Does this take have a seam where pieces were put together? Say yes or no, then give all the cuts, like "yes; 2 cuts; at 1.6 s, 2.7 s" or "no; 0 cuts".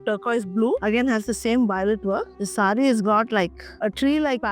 yes; 1 cut; at 2.4 s